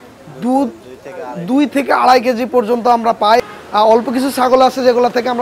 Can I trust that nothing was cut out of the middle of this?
no; 1 cut; at 3.4 s

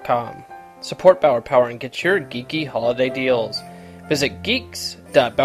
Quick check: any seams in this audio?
no; 0 cuts

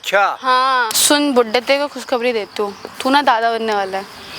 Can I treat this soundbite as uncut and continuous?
no; 1 cut; at 1.0 s

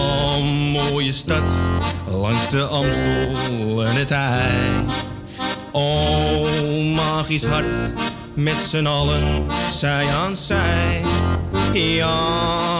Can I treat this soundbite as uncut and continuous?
yes; 0 cuts

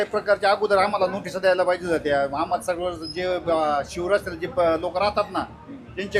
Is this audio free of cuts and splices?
yes; 0 cuts

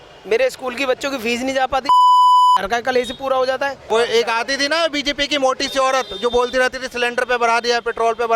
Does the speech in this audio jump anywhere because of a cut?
yes; 1 cut; at 3.8 s

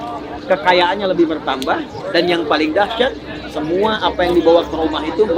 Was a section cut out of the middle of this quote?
no; 0 cuts

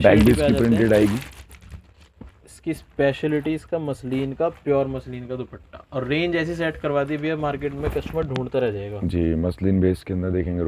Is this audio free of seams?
yes; 0 cuts

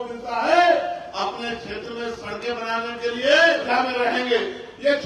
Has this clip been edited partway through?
yes; 1 cut; at 3.6 s

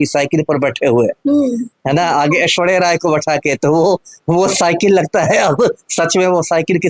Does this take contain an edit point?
no; 0 cuts

